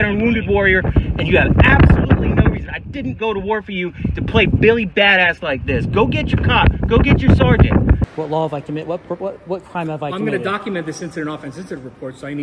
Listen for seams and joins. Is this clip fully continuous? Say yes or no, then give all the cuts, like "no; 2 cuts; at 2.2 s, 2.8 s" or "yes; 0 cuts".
no; 1 cut; at 8.0 s